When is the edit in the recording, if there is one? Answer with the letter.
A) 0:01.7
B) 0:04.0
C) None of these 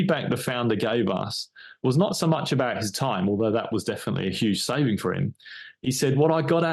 C